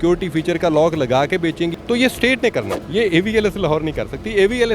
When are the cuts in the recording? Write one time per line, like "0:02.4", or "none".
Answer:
0:01.7
0:02.8